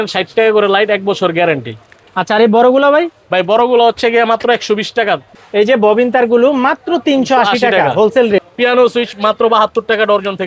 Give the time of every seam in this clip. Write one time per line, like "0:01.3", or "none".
0:02.0
0:05.4
0:08.5

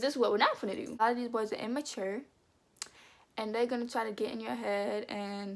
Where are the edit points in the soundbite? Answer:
0:01.0

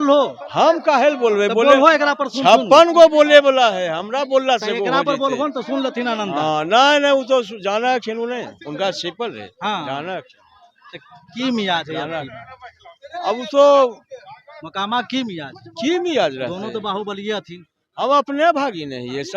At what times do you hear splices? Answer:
none

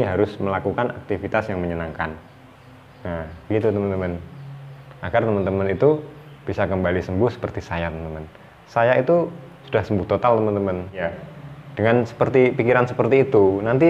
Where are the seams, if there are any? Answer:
0:11.1

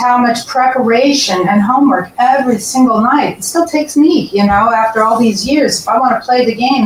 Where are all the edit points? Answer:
none

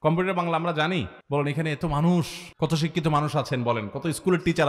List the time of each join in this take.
0:01.2
0:02.4

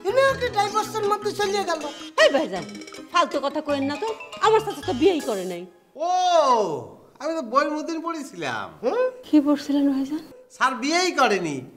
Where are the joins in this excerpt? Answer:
none

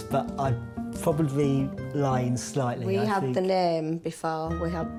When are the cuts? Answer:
none

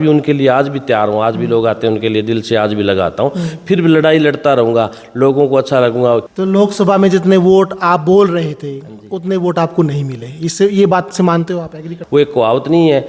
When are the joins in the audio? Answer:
0:06.3
0:11.9

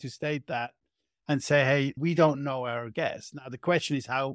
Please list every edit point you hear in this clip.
0:02.0

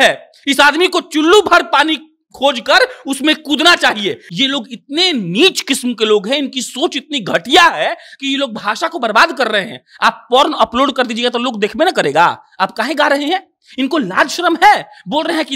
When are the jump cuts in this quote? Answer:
0:04.3

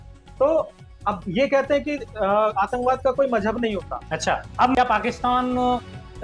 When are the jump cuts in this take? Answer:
0:04.8

